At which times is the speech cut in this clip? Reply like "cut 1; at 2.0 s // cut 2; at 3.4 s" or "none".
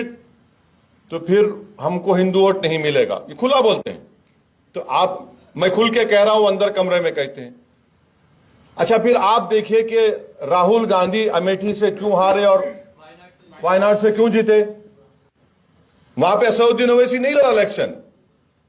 none

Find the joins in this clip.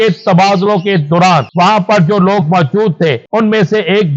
cut 1; at 1.5 s // cut 2; at 3.2 s

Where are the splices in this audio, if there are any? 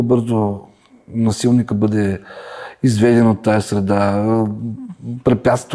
none

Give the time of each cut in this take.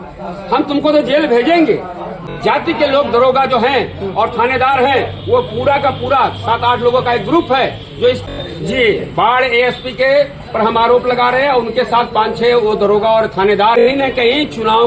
cut 1; at 2.2 s // cut 2; at 8.2 s // cut 3; at 13.8 s

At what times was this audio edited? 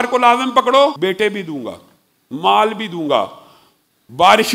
cut 1; at 1.0 s

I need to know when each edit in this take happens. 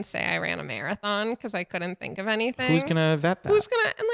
none

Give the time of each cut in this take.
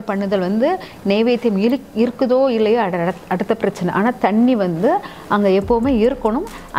none

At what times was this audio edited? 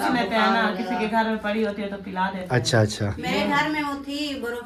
none

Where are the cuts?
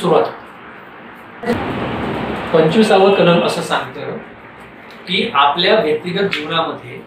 cut 1; at 1.2 s

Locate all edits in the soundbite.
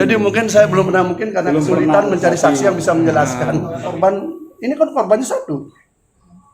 cut 1; at 3.9 s

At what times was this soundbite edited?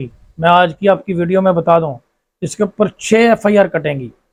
none

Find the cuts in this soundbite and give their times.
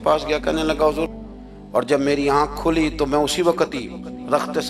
cut 1; at 1.1 s

